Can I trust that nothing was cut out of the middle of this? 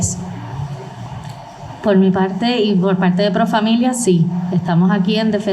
no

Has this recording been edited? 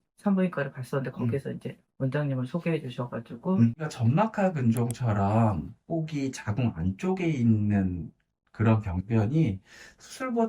yes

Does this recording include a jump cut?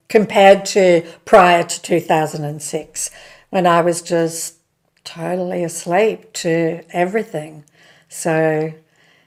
no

